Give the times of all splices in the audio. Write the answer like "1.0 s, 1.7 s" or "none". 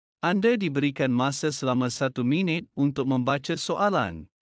3.6 s